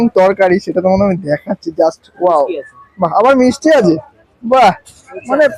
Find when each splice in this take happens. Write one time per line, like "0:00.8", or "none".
none